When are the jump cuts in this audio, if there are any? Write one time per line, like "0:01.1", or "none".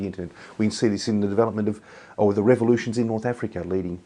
none